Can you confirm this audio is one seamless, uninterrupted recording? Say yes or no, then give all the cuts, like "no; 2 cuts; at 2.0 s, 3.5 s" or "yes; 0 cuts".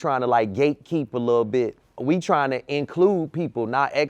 no; 1 cut; at 1.9 s